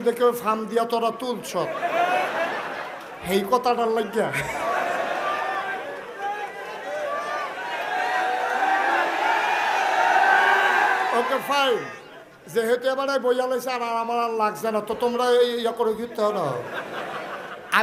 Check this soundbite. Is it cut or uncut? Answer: uncut